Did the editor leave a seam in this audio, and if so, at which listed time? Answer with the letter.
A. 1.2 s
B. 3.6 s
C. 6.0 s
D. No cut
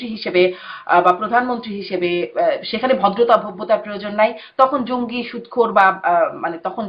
D